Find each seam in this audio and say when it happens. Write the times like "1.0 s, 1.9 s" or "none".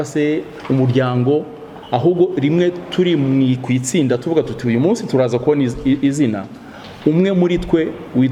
none